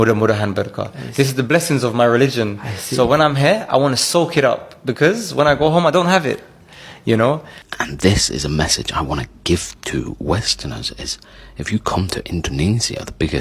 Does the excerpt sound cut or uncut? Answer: cut